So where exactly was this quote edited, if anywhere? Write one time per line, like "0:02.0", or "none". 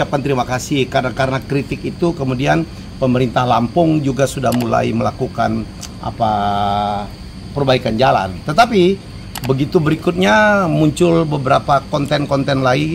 none